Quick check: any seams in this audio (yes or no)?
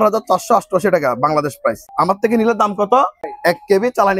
yes